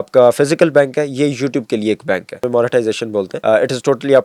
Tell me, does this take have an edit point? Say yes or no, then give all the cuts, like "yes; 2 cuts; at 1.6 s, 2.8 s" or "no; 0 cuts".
yes; 2 cuts; at 2.4 s, 3.3 s